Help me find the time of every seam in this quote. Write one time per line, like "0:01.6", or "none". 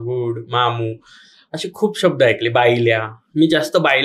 none